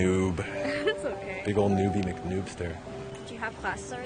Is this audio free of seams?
no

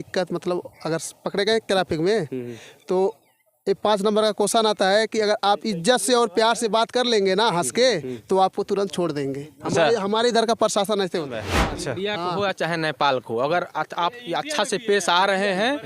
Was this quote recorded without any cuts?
no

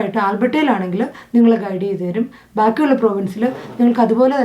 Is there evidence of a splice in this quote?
no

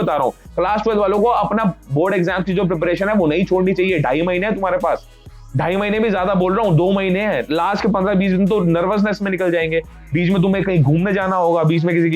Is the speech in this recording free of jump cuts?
yes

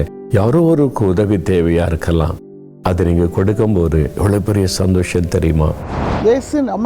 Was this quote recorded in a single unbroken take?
no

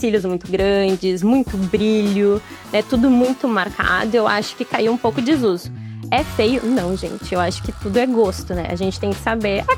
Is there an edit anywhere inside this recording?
no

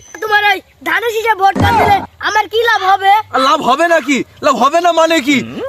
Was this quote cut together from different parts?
no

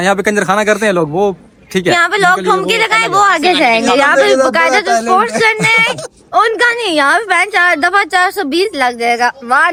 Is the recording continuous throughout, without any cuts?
yes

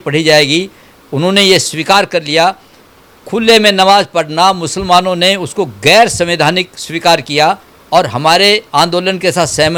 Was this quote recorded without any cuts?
yes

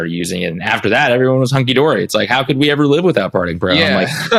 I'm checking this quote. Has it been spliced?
no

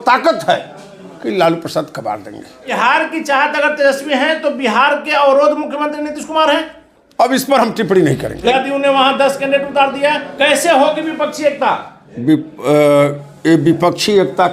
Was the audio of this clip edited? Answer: yes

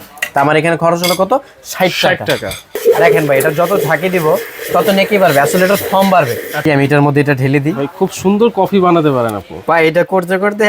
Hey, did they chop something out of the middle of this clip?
yes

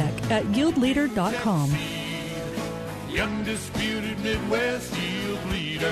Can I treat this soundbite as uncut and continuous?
yes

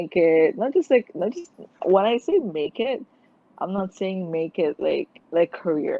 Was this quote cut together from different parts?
no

